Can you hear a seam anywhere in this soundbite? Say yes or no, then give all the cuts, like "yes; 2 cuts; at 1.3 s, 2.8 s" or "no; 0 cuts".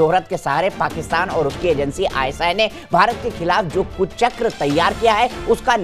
no; 0 cuts